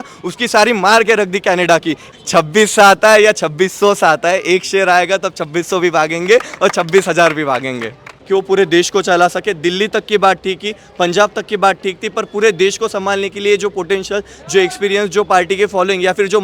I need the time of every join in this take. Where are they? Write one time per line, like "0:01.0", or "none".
0:02.0
0:08.1